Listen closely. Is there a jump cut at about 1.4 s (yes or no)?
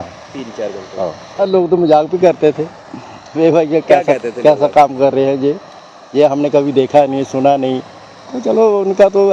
yes